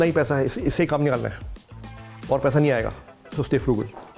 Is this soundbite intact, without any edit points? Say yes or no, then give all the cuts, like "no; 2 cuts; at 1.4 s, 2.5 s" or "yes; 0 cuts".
yes; 0 cuts